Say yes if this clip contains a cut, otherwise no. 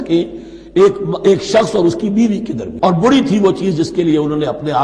yes